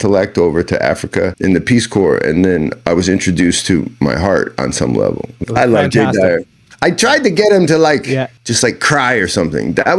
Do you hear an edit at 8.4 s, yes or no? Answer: yes